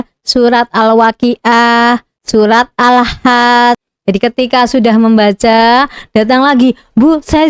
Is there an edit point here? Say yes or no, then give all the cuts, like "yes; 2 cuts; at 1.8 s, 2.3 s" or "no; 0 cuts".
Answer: yes; 1 cut; at 3.9 s